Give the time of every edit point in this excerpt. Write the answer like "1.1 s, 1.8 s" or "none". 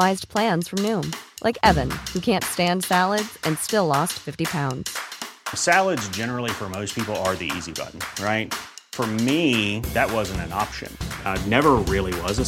none